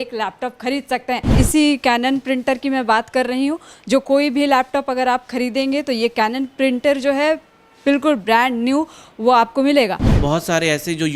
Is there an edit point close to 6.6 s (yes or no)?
no